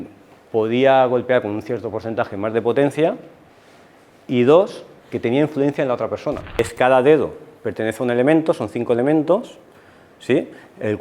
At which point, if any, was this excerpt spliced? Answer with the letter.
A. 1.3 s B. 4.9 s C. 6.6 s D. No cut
C